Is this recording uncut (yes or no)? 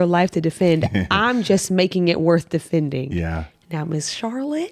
yes